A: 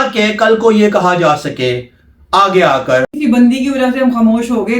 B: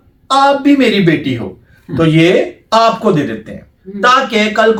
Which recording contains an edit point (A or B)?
A